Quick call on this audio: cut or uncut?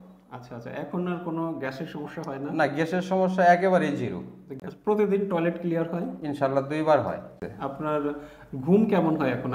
cut